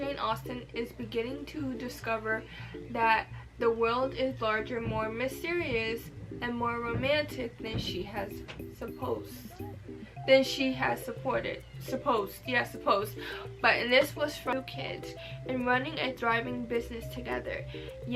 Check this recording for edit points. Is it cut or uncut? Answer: cut